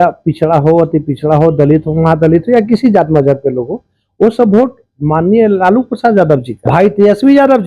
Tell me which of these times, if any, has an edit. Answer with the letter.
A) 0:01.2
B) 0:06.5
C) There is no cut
B